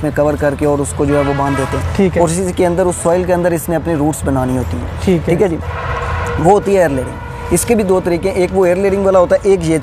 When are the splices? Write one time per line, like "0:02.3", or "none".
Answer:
none